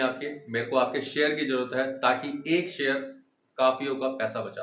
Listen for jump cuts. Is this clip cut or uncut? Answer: uncut